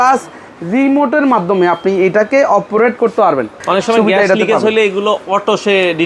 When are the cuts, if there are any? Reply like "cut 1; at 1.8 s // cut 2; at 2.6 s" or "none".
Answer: cut 1; at 3.6 s